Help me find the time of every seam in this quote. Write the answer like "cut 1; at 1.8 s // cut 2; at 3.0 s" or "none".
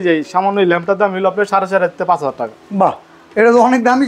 none